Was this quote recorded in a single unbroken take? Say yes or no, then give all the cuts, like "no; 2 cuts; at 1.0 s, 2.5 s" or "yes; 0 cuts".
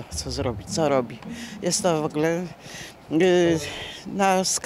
yes; 0 cuts